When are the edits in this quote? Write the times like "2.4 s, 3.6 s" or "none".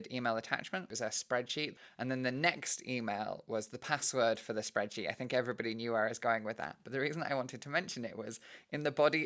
0.9 s, 1.7 s